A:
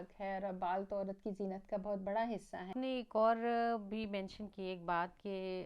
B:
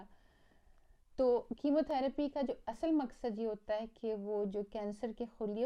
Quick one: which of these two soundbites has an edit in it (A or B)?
A